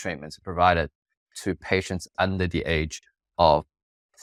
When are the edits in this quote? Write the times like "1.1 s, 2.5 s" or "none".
none